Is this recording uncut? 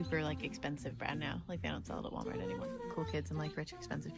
no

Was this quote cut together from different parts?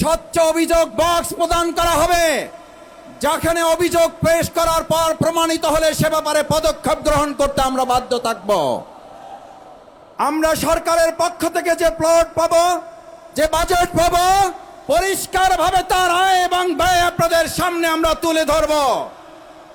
no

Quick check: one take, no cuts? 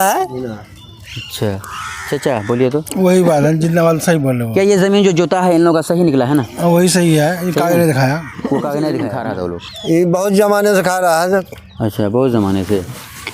no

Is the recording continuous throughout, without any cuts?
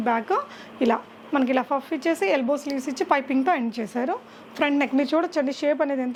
yes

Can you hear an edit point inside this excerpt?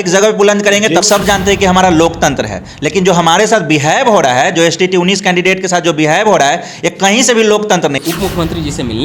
yes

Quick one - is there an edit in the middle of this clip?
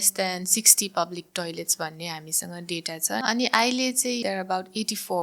yes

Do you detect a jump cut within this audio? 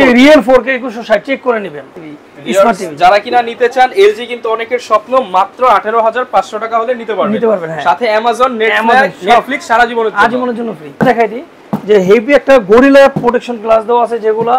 yes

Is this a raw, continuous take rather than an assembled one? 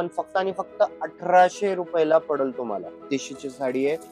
no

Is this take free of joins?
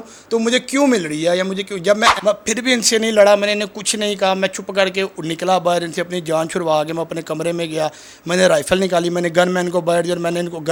yes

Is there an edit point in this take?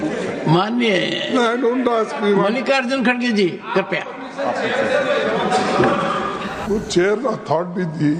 yes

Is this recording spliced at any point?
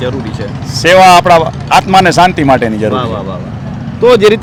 no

